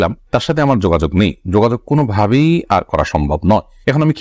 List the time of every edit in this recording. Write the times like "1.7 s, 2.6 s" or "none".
none